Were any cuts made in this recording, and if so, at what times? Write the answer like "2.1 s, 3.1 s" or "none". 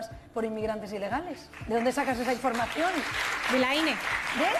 none

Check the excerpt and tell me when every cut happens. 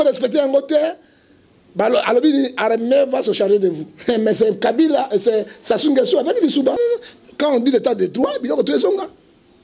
6.8 s

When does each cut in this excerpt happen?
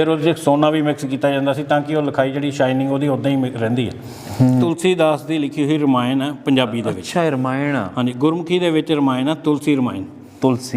4.6 s

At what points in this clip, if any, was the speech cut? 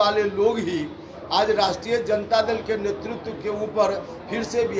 none

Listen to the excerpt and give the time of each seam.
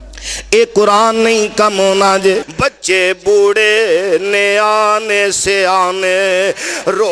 2.5 s

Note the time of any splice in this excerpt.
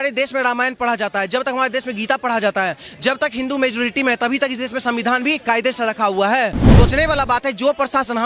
6.6 s

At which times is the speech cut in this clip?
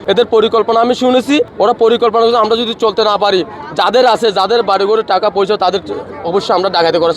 1.5 s

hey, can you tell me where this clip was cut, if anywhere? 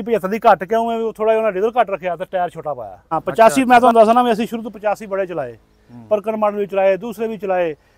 3.1 s

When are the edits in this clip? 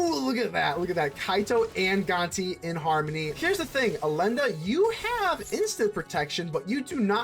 3.3 s

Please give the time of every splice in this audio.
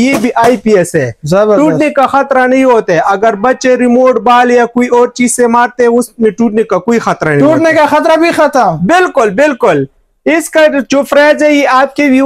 none

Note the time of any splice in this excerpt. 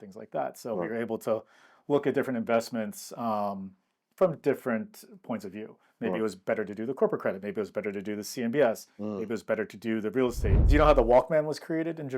10.6 s

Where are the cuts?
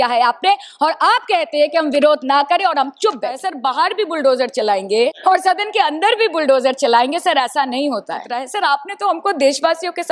3.5 s, 5.2 s, 8.5 s

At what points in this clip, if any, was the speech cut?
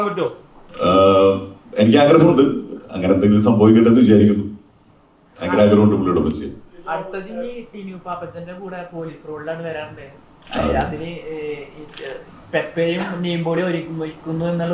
none

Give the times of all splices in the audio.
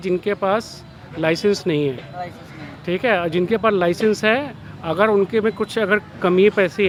none

